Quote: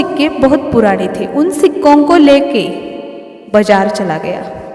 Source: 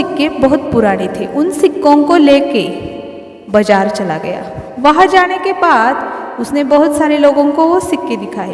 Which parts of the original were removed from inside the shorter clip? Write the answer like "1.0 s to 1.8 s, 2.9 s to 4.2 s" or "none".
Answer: none

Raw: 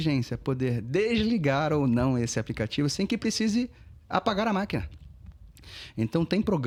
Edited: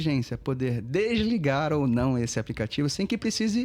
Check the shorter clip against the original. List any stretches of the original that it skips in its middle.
none

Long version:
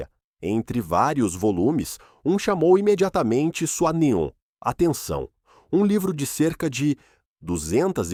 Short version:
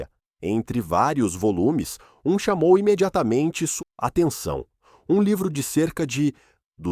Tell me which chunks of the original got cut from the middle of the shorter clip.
3.7 s to 4.4 s

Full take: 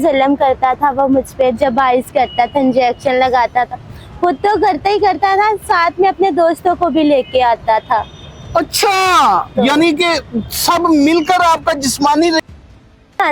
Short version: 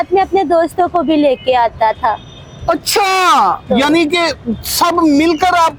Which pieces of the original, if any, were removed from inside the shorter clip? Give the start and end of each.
none

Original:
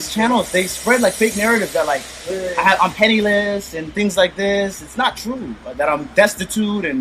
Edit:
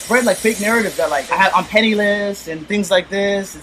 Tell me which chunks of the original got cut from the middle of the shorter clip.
2.0 s to 2.5 s

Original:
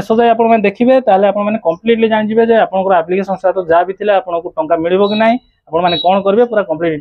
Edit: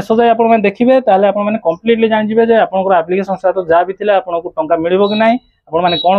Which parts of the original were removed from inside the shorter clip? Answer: none

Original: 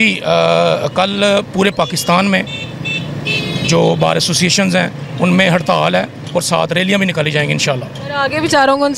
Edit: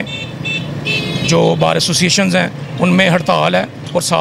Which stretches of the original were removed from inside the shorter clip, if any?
none

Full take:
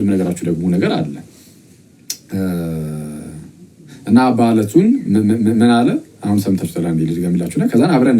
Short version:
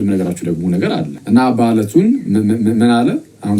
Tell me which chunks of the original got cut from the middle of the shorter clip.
1.2 s to 4.0 s

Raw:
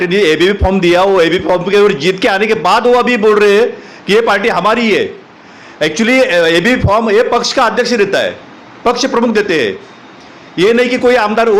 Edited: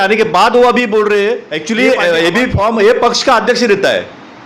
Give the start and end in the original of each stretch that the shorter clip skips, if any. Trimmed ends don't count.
3.8 s to 5.8 s

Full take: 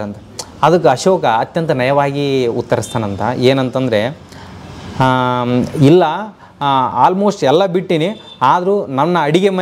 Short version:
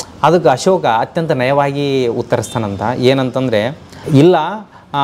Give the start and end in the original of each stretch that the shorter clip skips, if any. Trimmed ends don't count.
4.4 s to 5.7 s

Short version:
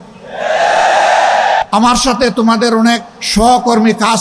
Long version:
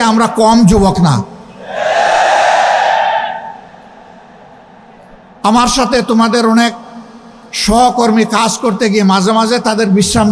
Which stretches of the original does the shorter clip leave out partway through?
3.0 s to 5.4 s, 6.9 s to 7.5 s

